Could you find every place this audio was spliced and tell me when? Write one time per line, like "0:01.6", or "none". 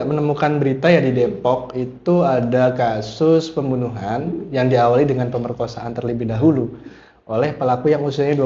none